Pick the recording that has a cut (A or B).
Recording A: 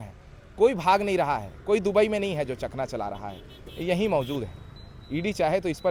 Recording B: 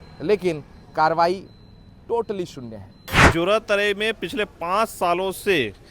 B